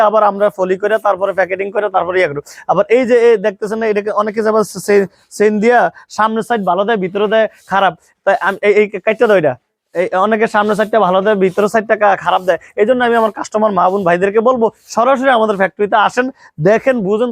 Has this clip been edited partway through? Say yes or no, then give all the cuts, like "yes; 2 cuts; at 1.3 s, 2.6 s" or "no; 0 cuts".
no; 0 cuts